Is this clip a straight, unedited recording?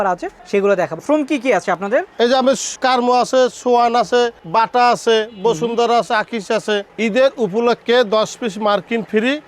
no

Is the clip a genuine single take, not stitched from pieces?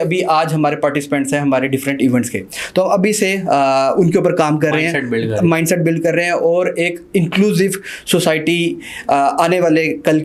yes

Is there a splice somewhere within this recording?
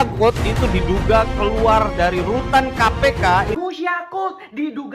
yes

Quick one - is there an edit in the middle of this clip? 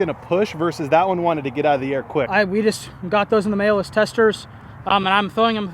yes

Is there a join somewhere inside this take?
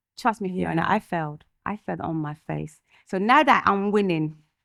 no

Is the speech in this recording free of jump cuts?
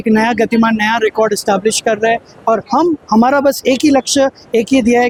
yes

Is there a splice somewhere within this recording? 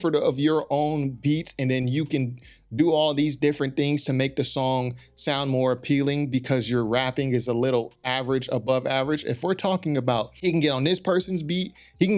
yes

